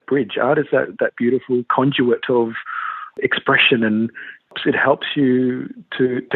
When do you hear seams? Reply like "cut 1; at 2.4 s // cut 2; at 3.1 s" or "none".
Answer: cut 1; at 3.2 s // cut 2; at 4.5 s